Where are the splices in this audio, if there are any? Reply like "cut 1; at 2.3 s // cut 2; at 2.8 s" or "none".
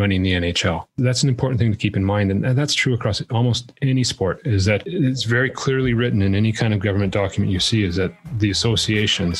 cut 1; at 0.9 s